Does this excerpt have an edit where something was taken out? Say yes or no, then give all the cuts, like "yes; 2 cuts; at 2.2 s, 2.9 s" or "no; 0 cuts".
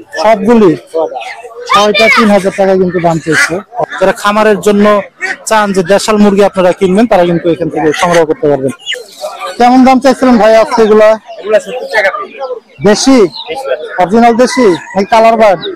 yes; 2 cuts; at 3.9 s, 8.9 s